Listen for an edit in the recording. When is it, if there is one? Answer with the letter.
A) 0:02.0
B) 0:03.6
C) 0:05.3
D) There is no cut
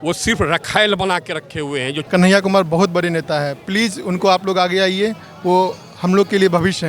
A